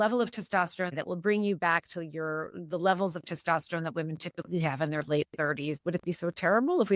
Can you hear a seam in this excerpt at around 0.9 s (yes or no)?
yes